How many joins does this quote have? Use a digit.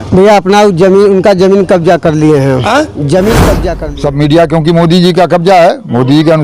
1